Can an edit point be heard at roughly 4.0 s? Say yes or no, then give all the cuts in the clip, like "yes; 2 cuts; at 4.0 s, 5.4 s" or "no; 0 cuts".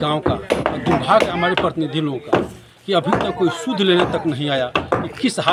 no; 0 cuts